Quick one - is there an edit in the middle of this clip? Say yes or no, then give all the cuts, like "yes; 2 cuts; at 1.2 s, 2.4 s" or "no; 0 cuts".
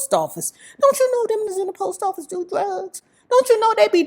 yes; 1 cut; at 1.5 s